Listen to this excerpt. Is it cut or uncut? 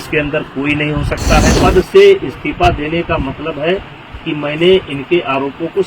cut